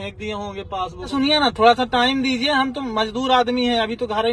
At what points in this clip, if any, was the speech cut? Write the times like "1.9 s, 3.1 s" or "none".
1.1 s

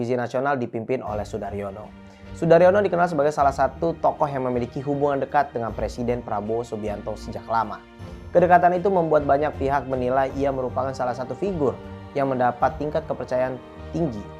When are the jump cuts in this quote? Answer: none

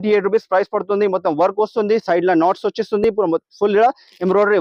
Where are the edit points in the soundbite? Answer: none

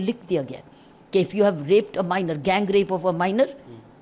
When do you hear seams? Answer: none

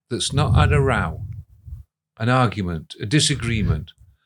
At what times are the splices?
none

